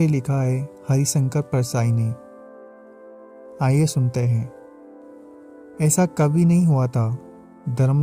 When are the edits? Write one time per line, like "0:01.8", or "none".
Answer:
0:02.2
0:03.6